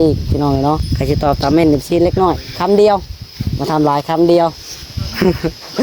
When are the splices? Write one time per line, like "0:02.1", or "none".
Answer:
0:00.9